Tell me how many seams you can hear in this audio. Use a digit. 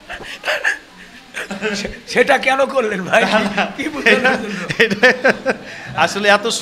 0